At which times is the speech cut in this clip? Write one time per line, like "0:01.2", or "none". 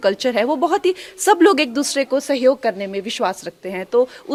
none